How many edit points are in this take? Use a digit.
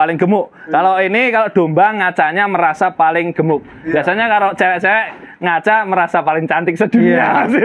0